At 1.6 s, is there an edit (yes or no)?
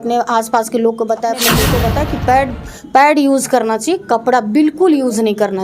yes